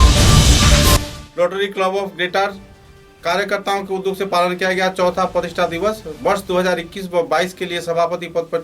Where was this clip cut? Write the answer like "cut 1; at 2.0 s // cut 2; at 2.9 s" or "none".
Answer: cut 1; at 1.0 s